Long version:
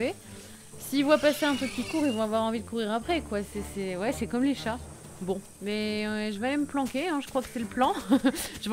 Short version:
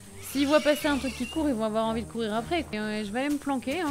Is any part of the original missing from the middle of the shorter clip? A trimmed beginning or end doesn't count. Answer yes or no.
yes